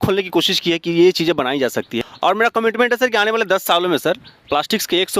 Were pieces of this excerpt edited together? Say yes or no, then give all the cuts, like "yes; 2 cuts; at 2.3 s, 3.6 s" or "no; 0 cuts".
yes; 1 cut; at 2.0 s